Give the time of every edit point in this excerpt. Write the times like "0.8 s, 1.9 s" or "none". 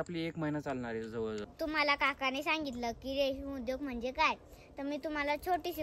1.5 s